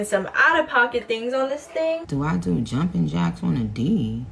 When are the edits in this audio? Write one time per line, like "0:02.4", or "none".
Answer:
none